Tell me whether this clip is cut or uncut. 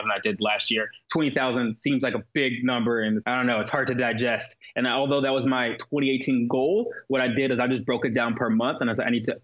cut